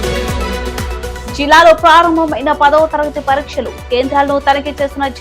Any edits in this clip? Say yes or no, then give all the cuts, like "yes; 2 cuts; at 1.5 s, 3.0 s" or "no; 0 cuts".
yes; 1 cut; at 1.2 s